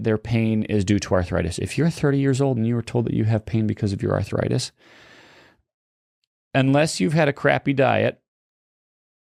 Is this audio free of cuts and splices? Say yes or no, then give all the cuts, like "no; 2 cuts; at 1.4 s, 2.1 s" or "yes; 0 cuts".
yes; 0 cuts